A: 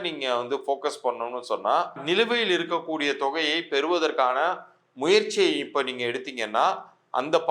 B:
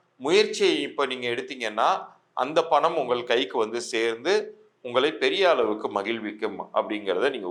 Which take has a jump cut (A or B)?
A